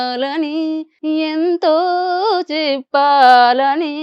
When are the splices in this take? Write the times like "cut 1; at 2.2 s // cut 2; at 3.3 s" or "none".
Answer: cut 1; at 0.9 s